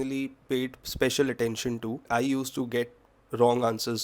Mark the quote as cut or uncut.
cut